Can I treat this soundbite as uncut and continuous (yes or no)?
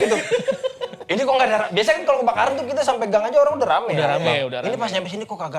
yes